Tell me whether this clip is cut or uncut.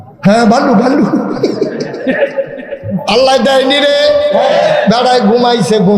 cut